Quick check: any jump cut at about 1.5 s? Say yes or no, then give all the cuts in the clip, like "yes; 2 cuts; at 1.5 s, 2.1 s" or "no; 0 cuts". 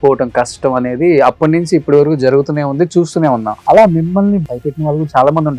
no; 2 cuts; at 3.5 s, 4.4 s